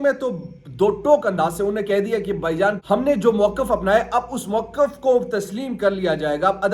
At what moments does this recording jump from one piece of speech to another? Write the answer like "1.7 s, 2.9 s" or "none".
2.8 s